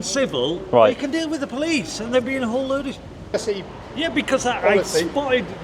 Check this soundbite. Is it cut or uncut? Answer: cut